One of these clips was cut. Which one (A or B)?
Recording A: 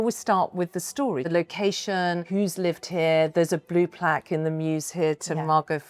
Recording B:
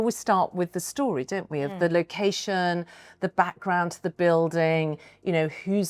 A